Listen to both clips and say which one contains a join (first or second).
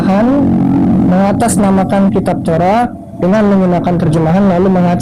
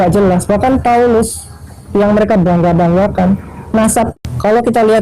second